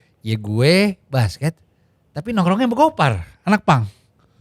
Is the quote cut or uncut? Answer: uncut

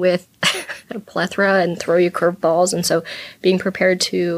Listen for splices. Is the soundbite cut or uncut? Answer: cut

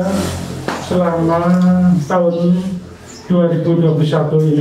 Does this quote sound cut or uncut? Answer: uncut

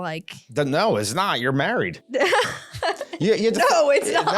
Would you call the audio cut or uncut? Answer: cut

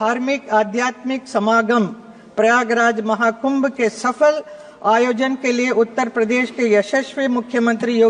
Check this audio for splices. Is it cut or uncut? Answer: uncut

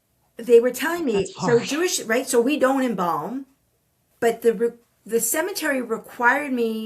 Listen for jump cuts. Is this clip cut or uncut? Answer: cut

